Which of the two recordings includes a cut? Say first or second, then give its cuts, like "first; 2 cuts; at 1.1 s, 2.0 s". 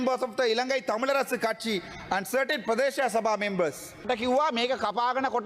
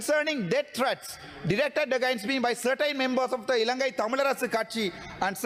first; 1 cut; at 4.1 s